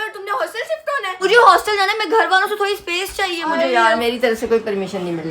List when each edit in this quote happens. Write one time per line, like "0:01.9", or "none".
0:01.1
0:04.0